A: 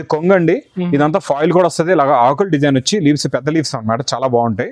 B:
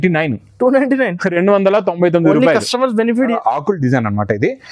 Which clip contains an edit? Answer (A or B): B